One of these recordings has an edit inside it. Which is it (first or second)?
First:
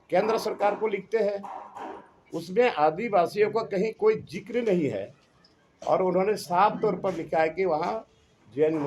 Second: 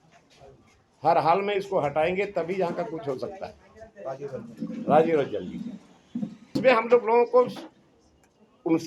second